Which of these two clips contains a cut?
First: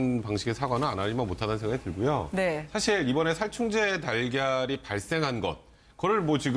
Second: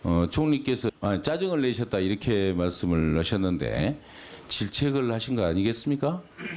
second; 1 cut; at 5.2 s

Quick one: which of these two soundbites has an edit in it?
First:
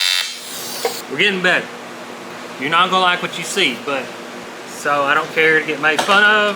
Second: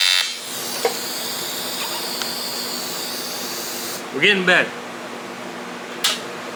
first; 3 cuts; at 1.0 s, 2.3 s, 4.5 s

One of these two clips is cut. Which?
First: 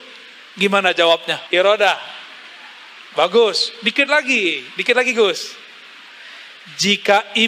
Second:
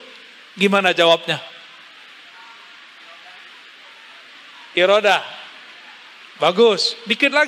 first; 1 cut; at 1.3 s

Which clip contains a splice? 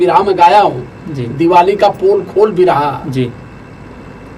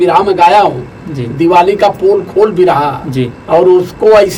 second; 1 cut; at 3.4 s

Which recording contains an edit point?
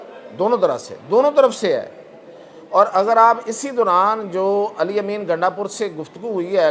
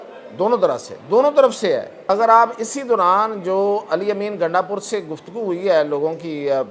second; 1 cut; at 2.0 s

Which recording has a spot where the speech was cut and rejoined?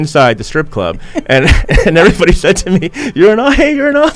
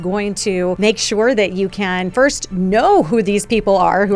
second; 2 cuts; at 0.8 s, 2.0 s

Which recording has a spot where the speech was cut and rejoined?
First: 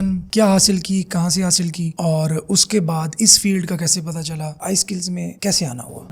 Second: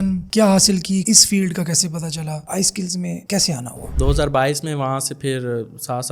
second; 2 cuts; at 1.0 s, 3.8 s

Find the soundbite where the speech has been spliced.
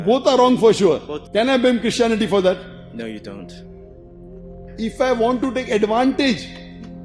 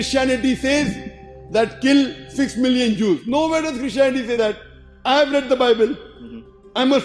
first; 1 cut; at 1.1 s

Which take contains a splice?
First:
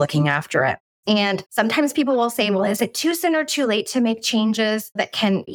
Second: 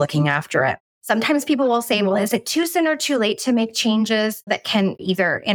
second; 1 cut; at 1.0 s

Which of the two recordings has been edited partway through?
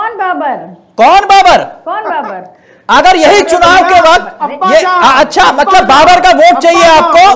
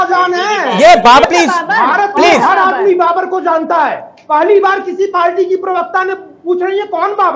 second; 1 cut; at 1.2 s

